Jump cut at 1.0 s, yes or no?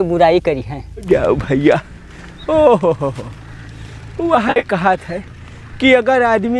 yes